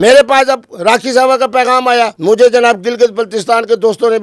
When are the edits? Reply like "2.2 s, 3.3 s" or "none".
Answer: 2.2 s